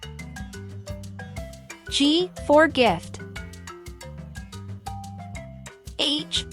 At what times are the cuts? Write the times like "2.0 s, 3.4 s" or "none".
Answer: 3.3 s, 5.4 s